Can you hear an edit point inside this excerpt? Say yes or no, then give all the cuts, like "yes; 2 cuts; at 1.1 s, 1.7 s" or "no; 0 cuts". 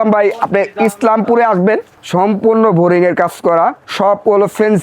yes; 2 cuts; at 2.0 s, 3.8 s